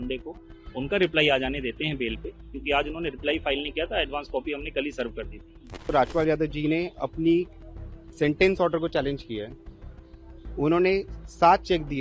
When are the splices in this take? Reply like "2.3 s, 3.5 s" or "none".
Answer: 5.8 s